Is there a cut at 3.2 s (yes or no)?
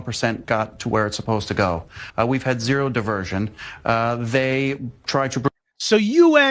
no